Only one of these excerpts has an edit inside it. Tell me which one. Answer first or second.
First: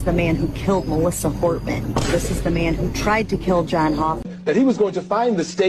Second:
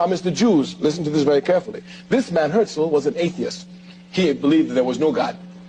first